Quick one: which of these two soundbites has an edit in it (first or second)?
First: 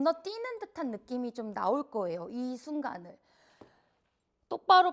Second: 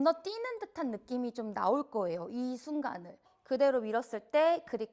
second